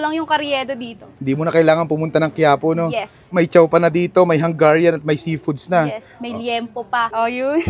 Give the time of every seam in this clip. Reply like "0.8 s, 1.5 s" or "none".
none